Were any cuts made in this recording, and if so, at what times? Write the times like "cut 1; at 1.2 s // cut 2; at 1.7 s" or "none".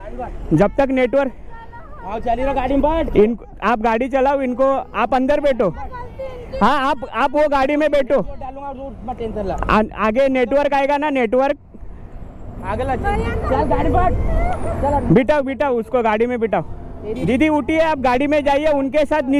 none

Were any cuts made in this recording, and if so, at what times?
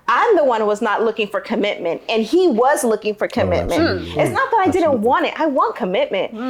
none

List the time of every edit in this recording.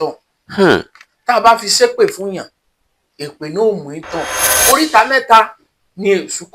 cut 1; at 4.5 s

